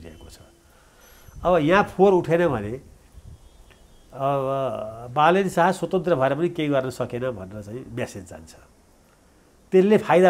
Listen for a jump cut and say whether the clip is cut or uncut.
uncut